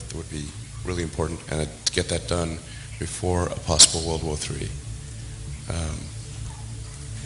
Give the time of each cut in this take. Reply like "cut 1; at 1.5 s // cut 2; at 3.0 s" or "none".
cut 1; at 6.3 s